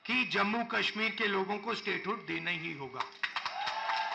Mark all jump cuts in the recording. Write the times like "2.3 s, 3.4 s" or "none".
none